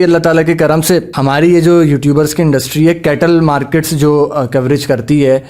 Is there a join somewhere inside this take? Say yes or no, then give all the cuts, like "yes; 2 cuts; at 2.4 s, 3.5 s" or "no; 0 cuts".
yes; 1 cut; at 1.1 s